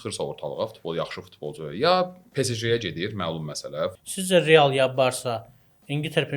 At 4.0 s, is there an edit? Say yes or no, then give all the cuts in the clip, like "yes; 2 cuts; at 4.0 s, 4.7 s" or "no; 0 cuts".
yes; 1 cut; at 4.0 s